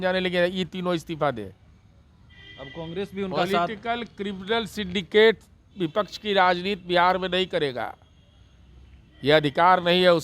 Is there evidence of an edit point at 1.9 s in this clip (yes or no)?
no